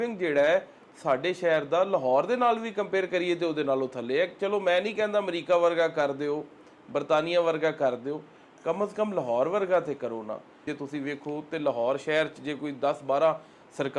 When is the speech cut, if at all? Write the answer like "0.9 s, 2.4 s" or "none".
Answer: 10.7 s